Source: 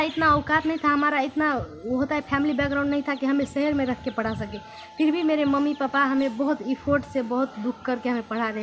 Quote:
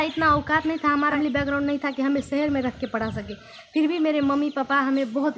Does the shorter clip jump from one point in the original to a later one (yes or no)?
yes